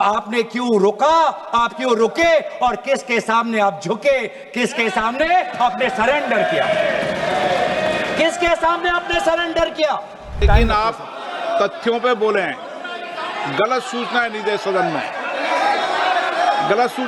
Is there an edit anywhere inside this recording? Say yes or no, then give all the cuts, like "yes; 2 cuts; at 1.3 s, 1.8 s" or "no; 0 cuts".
yes; 1 cut; at 10.4 s